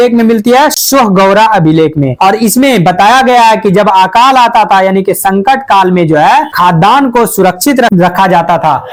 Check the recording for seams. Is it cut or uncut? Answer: uncut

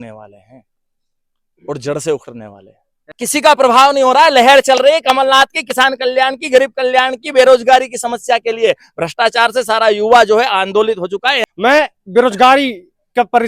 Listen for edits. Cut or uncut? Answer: cut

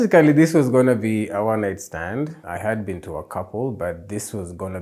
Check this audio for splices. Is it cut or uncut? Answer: cut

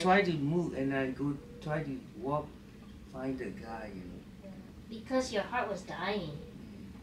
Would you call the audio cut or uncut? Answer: cut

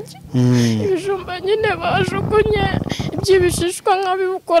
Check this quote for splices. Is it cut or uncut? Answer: uncut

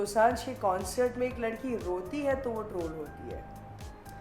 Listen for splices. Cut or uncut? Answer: uncut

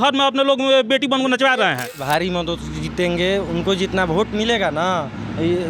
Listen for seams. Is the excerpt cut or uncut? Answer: cut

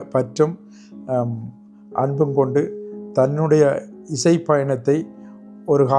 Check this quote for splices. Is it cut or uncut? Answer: uncut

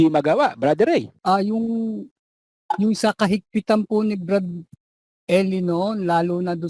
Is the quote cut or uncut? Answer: cut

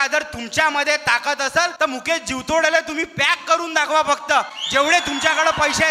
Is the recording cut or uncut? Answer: cut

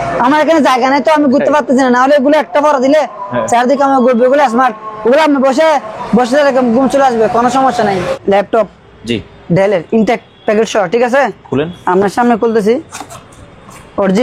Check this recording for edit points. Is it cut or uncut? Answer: cut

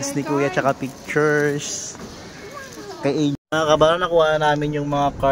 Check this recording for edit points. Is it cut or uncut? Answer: cut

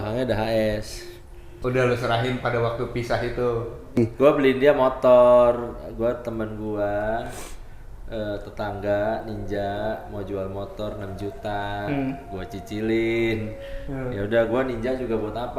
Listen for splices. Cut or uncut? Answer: cut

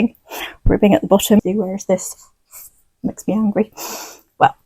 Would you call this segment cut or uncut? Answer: cut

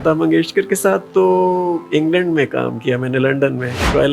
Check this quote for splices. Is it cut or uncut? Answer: uncut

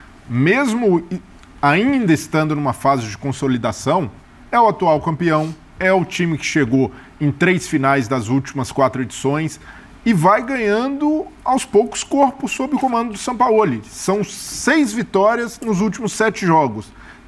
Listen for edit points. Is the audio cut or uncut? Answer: uncut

